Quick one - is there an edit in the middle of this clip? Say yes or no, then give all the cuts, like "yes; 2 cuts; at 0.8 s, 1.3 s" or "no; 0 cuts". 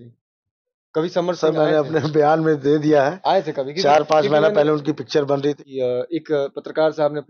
yes; 1 cut; at 5.6 s